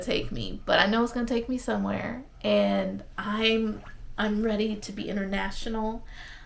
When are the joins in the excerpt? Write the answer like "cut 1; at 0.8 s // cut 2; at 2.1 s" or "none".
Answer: none